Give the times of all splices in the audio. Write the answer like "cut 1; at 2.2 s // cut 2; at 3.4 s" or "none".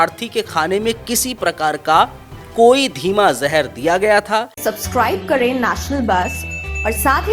cut 1; at 4.5 s